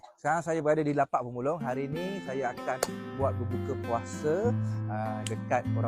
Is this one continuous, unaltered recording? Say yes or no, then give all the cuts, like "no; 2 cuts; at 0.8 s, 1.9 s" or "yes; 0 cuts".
yes; 0 cuts